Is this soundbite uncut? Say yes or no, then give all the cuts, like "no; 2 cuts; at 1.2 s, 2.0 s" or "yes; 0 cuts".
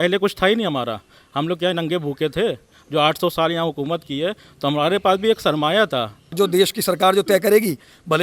no; 1 cut; at 6.3 s